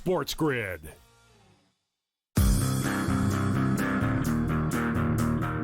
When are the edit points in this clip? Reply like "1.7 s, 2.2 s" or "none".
1.0 s, 2.5 s